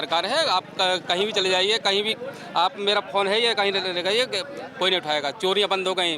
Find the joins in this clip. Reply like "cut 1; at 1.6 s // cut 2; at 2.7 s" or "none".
none